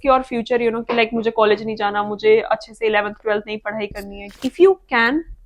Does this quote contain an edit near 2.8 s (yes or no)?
no